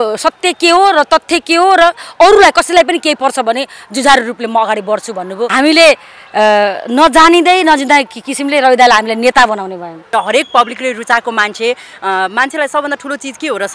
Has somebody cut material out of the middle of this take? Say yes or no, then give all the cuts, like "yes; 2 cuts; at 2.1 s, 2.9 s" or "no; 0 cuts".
yes; 2 cuts; at 5.4 s, 9.9 s